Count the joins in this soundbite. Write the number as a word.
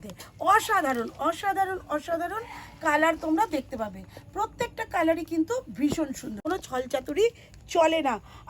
one